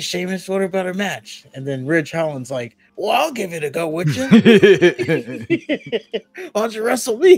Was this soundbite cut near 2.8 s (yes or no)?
yes